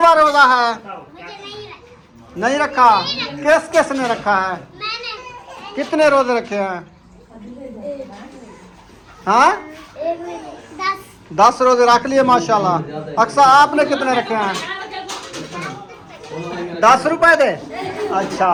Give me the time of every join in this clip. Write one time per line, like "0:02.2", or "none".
none